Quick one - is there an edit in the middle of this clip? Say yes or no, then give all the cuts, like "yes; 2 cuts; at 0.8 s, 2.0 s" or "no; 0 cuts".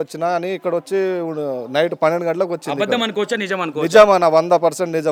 no; 0 cuts